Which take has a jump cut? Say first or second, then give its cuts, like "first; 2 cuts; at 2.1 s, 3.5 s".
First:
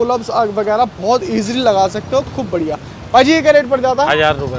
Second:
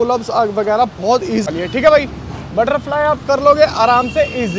second; 1 cut; at 1.5 s